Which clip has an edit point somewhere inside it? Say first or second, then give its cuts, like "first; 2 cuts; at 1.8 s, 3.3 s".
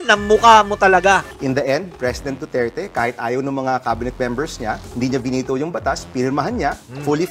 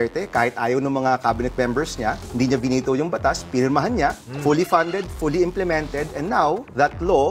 first; 1 cut; at 1.3 s